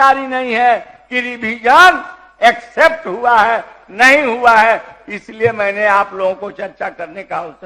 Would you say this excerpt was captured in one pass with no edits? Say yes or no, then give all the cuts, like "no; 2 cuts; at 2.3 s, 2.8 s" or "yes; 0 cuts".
yes; 0 cuts